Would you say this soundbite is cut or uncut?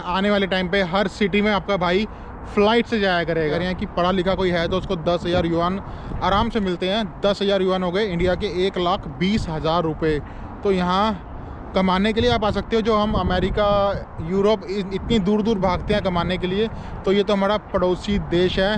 cut